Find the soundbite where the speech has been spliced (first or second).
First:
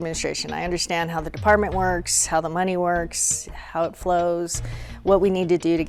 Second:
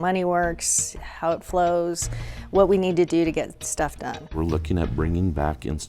second